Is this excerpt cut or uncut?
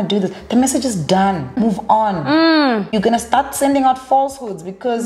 cut